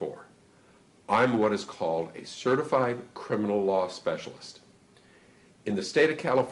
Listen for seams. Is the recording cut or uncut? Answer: uncut